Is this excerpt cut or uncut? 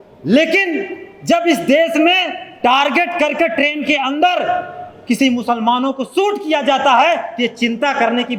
uncut